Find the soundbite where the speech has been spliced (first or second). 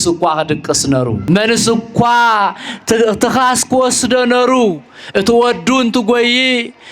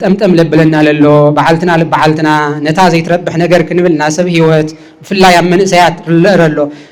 first